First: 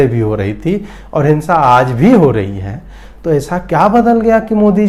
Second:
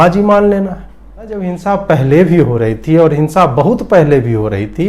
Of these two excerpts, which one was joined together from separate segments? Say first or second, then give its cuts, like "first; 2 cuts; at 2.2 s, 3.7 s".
second; 1 cut; at 1.3 s